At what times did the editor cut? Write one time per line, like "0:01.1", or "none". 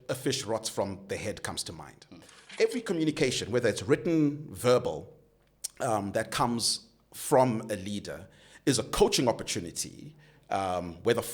0:02.4

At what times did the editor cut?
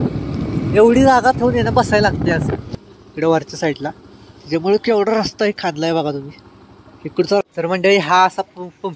0:02.7
0:07.4

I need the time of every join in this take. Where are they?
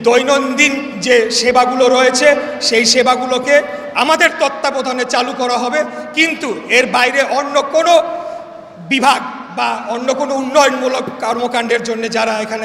none

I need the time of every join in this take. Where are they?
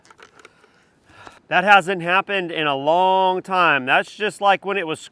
0:01.4

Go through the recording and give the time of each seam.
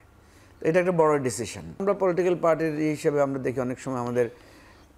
0:01.8

